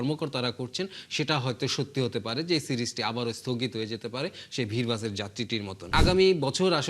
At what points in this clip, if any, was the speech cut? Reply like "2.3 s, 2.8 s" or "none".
5.9 s